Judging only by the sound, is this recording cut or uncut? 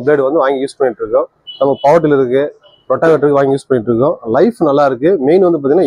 uncut